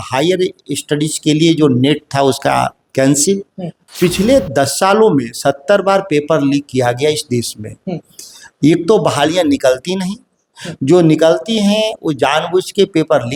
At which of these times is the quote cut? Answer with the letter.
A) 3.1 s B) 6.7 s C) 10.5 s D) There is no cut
D